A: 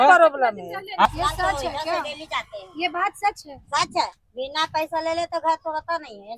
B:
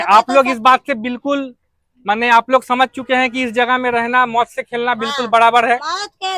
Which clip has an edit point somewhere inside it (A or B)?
A